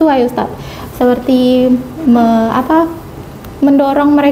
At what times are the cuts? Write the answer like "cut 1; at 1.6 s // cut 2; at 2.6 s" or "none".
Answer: none